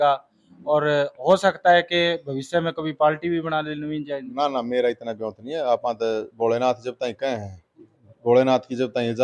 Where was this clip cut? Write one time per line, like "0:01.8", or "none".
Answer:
none